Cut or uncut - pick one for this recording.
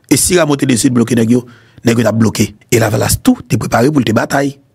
cut